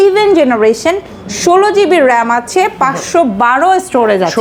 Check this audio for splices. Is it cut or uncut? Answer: uncut